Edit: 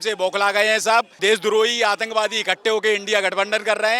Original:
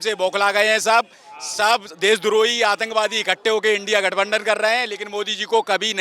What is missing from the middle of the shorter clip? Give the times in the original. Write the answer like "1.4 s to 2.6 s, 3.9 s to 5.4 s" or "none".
1.1 s to 1.9 s